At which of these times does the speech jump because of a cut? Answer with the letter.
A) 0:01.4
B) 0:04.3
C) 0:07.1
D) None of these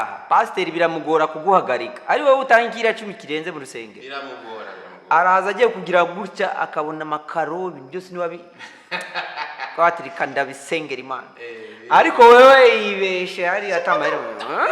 D